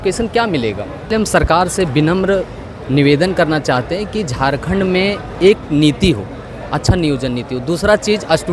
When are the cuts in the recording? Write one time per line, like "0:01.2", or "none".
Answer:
0:01.0